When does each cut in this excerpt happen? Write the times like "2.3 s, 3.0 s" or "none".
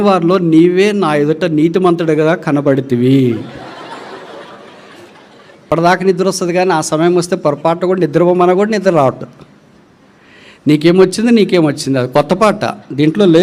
5.6 s